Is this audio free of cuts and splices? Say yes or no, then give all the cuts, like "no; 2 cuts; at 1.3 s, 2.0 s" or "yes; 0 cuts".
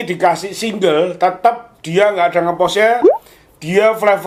yes; 0 cuts